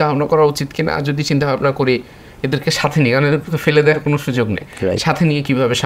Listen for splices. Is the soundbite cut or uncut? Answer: uncut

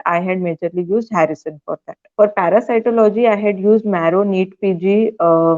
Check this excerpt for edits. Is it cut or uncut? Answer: cut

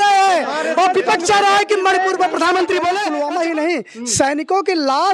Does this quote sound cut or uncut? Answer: cut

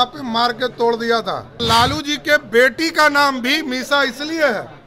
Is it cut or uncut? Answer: cut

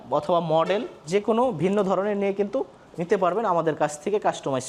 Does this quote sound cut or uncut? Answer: uncut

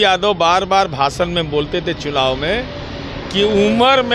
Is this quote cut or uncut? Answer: uncut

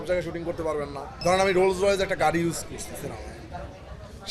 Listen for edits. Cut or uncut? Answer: cut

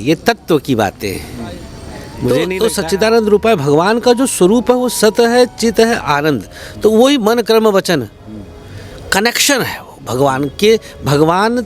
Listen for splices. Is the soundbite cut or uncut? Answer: cut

